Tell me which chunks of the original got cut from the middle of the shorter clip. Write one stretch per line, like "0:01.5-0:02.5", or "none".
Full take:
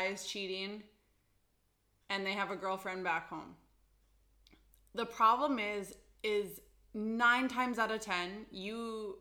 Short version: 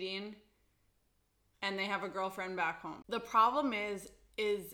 0:03.5-0:04.9

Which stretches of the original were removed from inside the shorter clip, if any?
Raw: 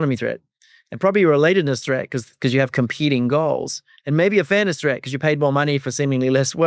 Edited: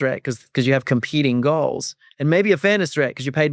none

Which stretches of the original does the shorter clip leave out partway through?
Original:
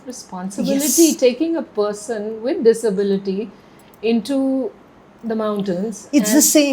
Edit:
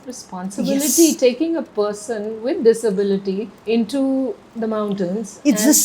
0:03.5-0:03.9
0:04.8-0:05.1

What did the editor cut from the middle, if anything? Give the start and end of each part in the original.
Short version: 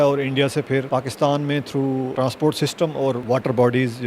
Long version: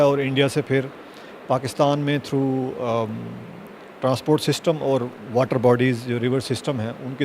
0:00.9-0:01.4
0:02.7-0:04.0
0:05.1-0:05.3

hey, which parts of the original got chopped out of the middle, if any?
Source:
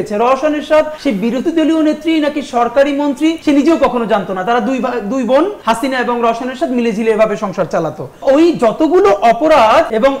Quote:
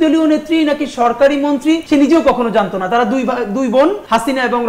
none

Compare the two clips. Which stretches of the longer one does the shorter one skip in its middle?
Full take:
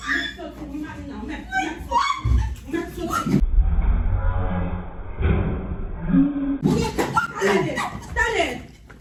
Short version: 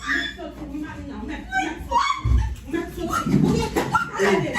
0:03.4-0:06.6

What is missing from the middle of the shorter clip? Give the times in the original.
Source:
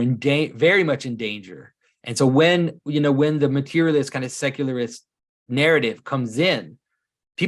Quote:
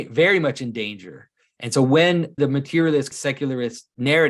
0:02.8-0:03.4
0:04.4-0:04.9

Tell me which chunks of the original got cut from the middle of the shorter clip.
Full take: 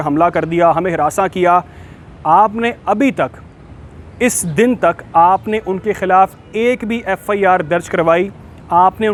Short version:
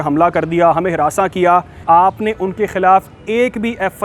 0:01.8-0:05.0

